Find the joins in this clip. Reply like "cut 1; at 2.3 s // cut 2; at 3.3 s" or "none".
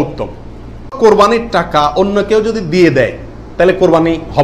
cut 1; at 1.0 s